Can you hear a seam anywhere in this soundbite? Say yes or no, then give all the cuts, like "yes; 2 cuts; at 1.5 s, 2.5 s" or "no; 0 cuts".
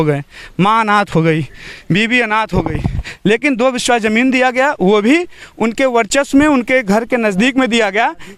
no; 0 cuts